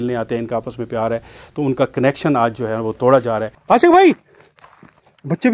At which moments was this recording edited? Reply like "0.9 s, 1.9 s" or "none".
3.5 s